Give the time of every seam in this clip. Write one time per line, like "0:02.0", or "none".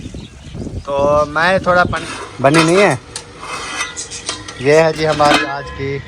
0:02.0